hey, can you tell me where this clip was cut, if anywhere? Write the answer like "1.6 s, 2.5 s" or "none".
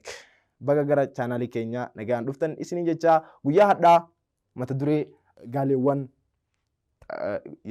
5.2 s